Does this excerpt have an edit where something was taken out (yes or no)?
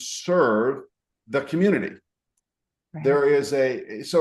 no